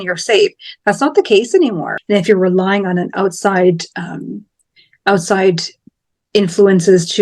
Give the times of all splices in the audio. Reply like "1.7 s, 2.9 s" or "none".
1.9 s